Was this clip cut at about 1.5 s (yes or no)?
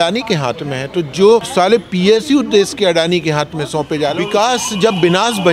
yes